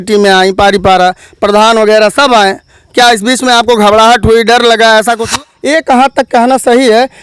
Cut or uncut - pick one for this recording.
cut